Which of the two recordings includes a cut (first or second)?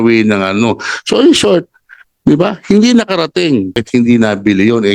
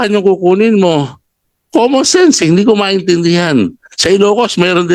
first